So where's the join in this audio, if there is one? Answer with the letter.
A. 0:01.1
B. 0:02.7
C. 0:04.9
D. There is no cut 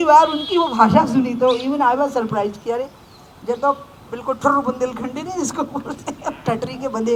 D